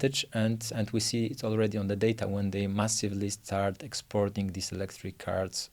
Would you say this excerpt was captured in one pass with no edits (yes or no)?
yes